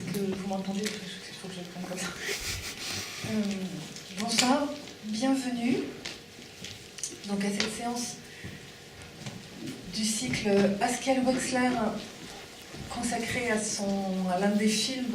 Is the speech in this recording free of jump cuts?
yes; 0 cuts

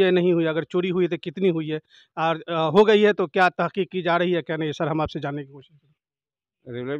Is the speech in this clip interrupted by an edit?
no; 0 cuts

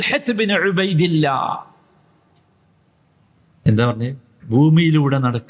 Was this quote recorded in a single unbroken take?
no; 2 cuts; at 3.7 s, 4.3 s

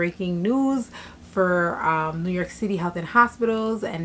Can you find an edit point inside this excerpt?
no; 0 cuts

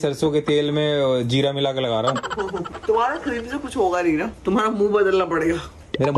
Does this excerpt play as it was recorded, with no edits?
no; 1 cut; at 2.7 s

